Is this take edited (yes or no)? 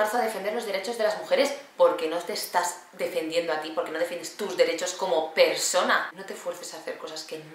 yes